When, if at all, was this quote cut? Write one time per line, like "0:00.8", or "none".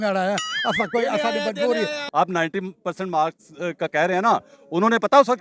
0:02.0